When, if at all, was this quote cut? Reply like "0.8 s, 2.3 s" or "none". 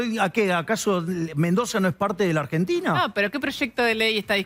none